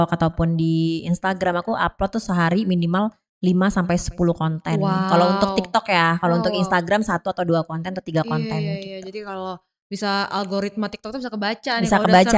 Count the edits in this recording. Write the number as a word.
zero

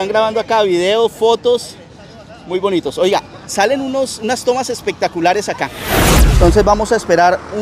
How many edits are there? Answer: one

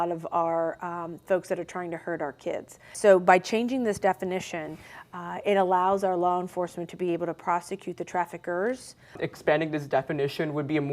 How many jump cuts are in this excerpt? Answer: two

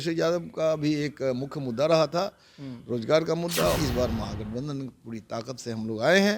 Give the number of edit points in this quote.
one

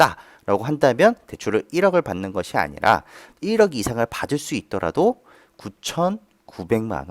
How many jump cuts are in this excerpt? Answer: zero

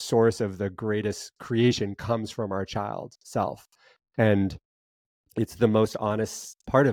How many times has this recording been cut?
zero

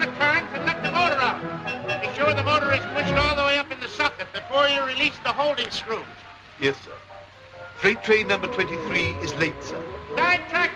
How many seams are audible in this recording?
one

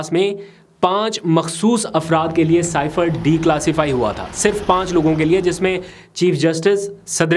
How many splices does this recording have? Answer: zero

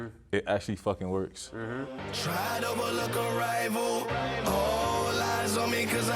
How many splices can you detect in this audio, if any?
one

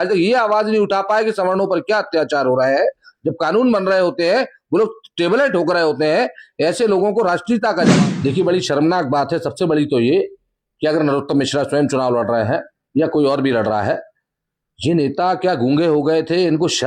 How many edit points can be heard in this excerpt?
one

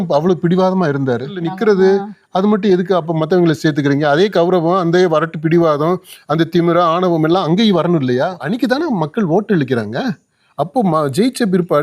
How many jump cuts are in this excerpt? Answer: two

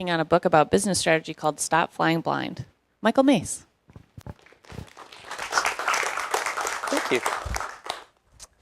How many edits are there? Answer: one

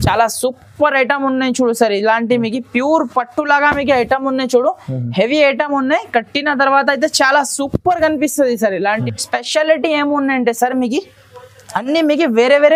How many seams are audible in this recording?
one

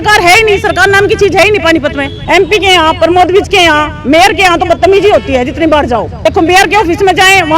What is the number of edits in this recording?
two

